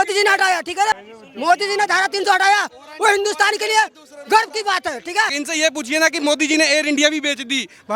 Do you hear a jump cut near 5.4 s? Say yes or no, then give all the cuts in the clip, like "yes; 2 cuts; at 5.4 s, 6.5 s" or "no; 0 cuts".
yes; 2 cuts; at 1.0 s, 5.4 s